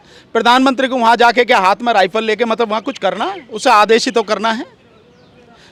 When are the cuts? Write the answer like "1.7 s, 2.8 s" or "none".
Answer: none